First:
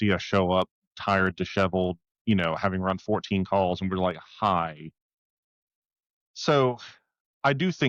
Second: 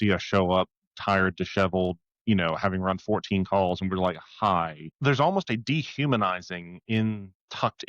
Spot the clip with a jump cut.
second; 1 cut; at 4.8 s

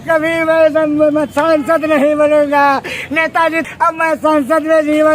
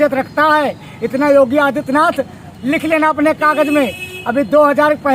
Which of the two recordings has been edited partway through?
first; 1 cut; at 3.6 s

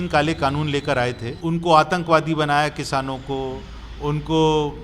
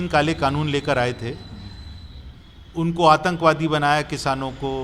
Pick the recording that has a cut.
first; 1 cut; at 1.3 s

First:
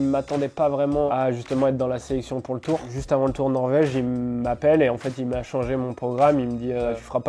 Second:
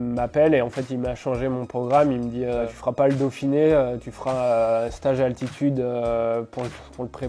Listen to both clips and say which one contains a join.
first; 2 cuts; at 1.1 s, 2.9 s

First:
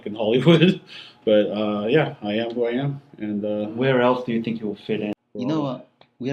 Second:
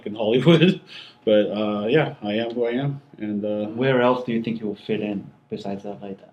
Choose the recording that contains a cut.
first; 1 cut; at 5.1 s

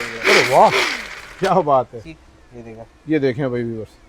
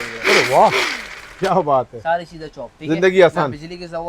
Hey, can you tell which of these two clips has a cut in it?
first; 1 cut; at 2.0 s

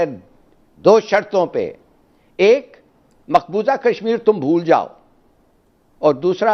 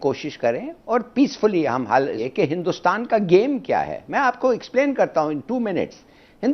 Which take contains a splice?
second; 1 cut; at 2.2 s

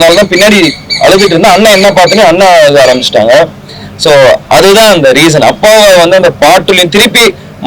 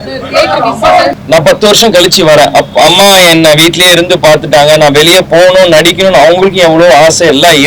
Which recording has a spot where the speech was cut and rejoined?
second; 1 cut; at 1.2 s

